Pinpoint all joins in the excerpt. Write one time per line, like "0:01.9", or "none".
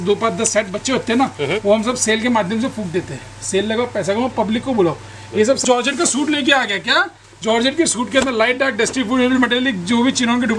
0:05.6

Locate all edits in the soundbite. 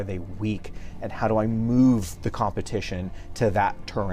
none

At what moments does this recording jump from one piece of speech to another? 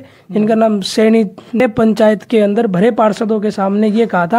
0:01.6

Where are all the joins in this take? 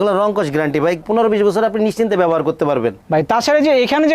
0:03.0

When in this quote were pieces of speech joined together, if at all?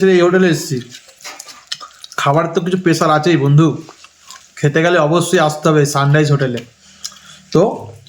none

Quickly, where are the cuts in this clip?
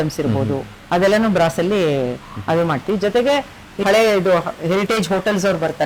0:03.8

